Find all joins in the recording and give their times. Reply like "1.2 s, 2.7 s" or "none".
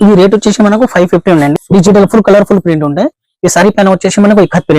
1.5 s